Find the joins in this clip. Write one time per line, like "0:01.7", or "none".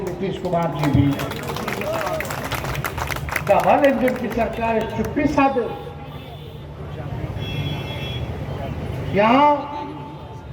none